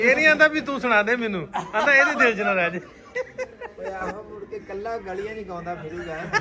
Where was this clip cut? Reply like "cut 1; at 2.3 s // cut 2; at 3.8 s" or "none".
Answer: none